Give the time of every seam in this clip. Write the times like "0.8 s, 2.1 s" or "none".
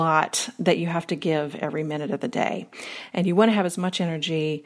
none